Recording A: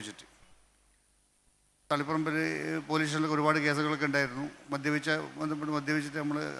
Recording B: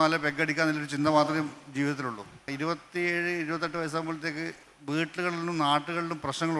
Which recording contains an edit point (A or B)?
B